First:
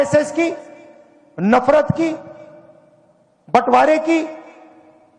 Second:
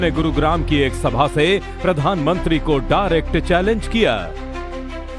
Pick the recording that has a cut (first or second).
first